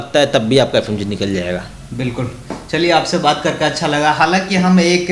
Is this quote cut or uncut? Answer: uncut